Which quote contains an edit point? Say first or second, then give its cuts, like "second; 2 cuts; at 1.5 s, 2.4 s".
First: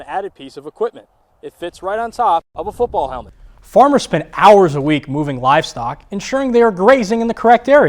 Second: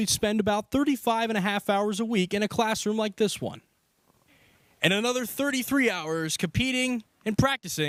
first; 1 cut; at 3.2 s